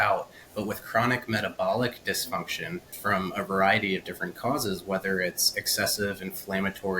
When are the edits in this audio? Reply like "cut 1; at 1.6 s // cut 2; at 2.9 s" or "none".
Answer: cut 1; at 2.9 s